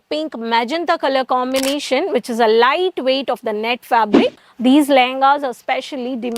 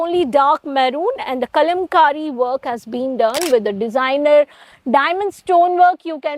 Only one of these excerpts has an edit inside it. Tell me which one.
first; 1 cut; at 4.4 s

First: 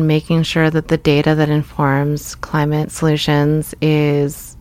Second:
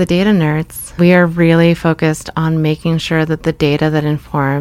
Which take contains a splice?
second; 1 cut; at 0.9 s

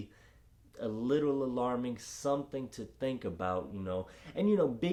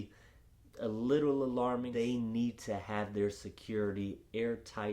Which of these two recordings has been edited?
second; 1 cut; at 1.9 s

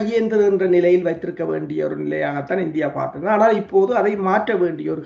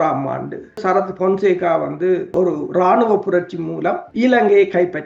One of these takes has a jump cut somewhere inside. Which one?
second; 3 cuts; at 0.8 s, 2.3 s, 4.0 s

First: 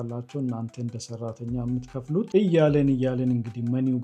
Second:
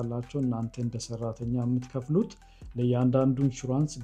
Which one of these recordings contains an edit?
first; 1 cut; at 2.3 s

